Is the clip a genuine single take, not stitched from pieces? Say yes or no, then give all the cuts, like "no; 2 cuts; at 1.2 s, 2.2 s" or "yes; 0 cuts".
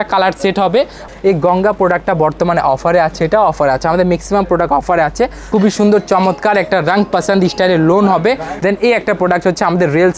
no; 3 cuts; at 1.0 s, 5.5 s, 8.5 s